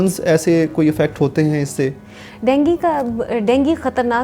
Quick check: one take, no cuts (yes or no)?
yes